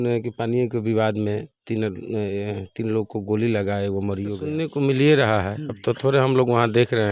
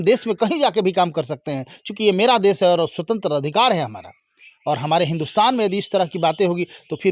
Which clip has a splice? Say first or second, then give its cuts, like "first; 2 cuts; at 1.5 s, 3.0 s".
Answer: first; 1 cut; at 4.6 s